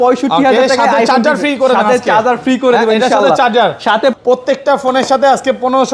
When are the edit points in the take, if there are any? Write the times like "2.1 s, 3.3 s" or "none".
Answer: 4.2 s